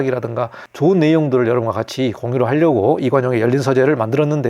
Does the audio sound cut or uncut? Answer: uncut